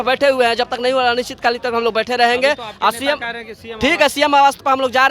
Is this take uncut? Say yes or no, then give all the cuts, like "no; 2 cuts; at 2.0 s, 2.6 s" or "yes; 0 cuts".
yes; 0 cuts